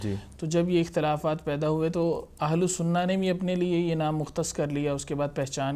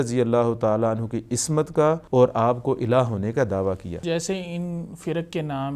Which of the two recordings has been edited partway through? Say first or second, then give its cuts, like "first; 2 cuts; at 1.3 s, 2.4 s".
second; 2 cuts; at 2.0 s, 4.0 s